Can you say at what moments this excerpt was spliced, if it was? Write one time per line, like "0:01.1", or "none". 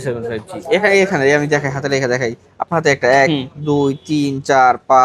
none